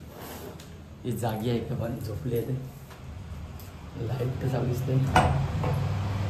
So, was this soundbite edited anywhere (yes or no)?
no